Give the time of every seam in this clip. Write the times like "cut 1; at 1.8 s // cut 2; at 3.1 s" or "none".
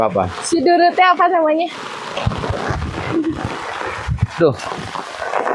cut 1; at 2.1 s